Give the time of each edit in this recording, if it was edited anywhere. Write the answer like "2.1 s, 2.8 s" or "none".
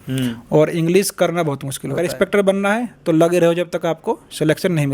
2.0 s